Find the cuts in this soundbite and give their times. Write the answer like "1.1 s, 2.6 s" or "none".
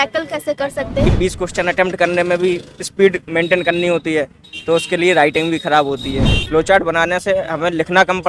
1.1 s, 6.4 s